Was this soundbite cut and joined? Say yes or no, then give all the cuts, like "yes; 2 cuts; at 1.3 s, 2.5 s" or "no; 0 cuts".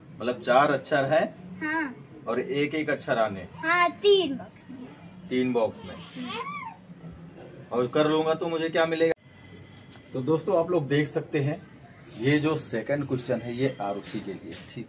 yes; 1 cut; at 9.1 s